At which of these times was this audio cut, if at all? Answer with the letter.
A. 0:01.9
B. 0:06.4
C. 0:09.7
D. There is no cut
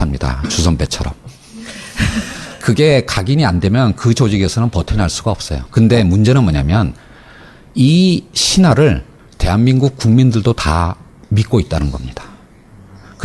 D